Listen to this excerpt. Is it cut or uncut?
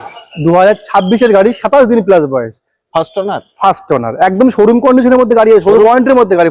uncut